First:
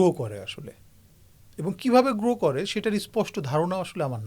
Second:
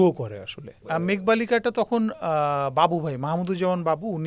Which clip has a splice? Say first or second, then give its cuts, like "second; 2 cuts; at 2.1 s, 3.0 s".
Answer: second; 1 cut; at 1.1 s